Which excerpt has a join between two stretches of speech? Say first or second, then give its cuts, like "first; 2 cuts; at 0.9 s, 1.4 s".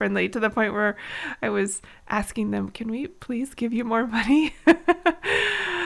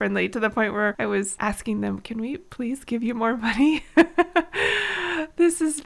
second; 1 cut; at 1.2 s